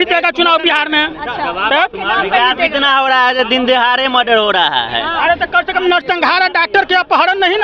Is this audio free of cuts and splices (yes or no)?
yes